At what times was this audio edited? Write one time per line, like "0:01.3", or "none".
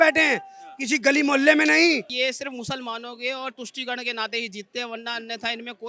0:02.1